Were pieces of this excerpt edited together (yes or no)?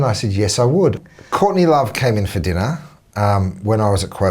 yes